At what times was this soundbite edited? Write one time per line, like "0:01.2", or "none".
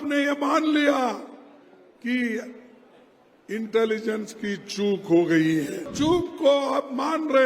0:05.9